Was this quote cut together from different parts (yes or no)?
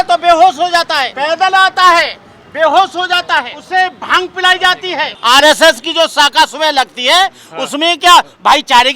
yes